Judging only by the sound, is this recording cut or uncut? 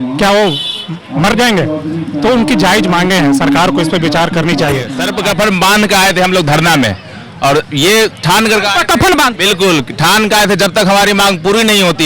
cut